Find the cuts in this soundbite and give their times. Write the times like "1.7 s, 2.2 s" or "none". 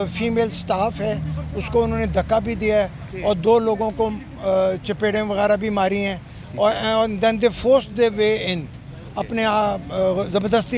none